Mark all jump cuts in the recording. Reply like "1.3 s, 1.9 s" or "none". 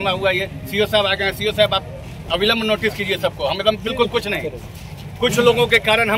none